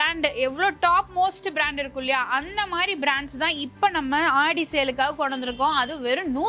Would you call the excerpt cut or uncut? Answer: uncut